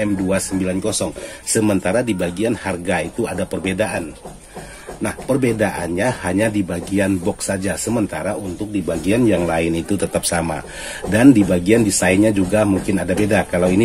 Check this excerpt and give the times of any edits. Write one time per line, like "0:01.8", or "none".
none